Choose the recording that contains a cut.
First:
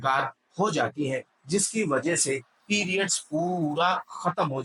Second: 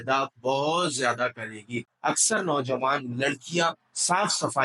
second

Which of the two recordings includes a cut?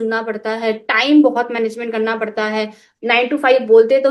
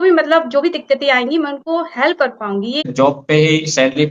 second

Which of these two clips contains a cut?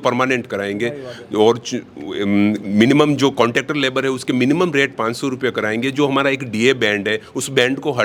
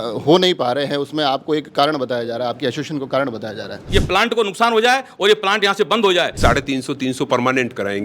second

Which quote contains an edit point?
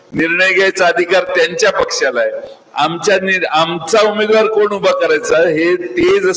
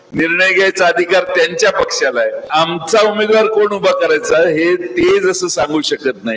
second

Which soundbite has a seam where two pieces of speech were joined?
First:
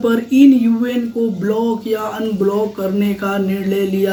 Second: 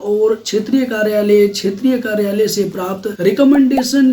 second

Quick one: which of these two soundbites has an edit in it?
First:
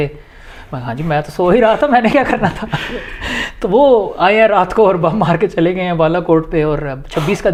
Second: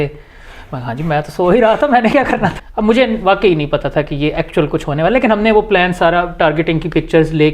second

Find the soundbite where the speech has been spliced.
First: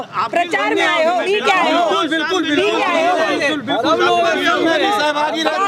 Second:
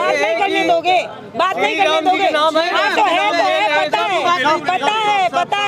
first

